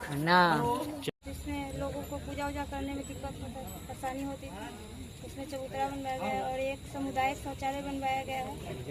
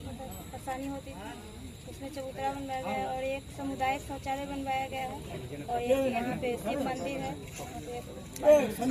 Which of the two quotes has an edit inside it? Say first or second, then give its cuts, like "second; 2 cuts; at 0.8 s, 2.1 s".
first; 1 cut; at 1.0 s